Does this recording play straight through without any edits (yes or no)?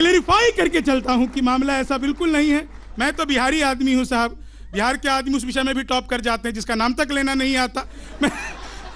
yes